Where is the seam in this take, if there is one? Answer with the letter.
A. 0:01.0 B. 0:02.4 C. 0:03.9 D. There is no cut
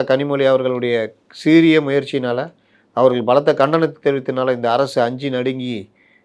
D